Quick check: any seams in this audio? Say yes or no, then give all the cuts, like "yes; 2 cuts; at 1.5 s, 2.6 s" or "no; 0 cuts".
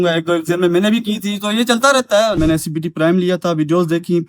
yes; 1 cut; at 2.4 s